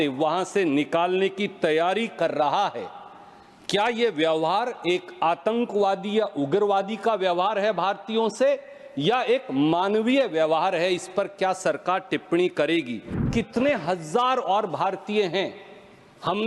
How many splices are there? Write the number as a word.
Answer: one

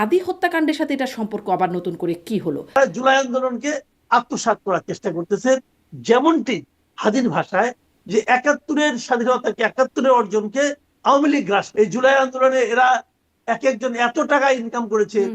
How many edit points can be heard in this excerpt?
two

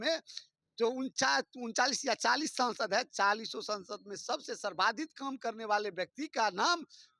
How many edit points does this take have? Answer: zero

